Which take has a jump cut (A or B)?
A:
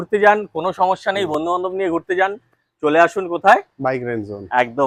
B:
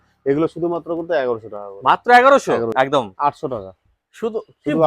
B